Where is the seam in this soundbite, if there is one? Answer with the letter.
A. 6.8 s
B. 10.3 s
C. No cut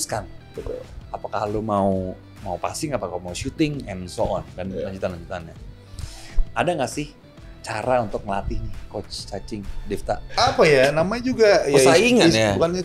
B